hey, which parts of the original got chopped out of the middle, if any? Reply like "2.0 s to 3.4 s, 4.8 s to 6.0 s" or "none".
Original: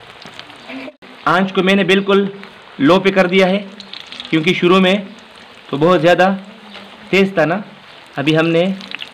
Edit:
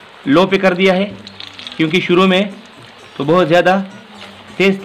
none